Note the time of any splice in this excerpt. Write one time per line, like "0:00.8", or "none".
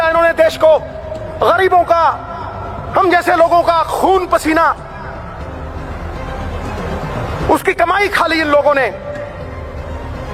none